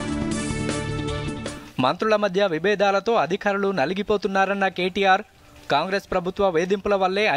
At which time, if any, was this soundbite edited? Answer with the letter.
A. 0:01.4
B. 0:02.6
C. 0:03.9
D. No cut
A